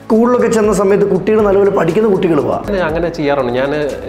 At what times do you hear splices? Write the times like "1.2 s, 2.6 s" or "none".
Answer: 2.7 s